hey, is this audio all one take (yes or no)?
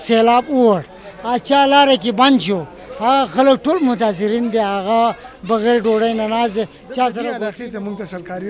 no